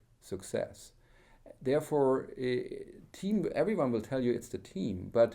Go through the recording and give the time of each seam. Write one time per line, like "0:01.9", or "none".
none